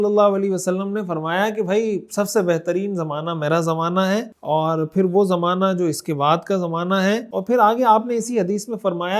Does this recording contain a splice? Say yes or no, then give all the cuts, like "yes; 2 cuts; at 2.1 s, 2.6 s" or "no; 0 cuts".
yes; 2 cuts; at 4.3 s, 7.3 s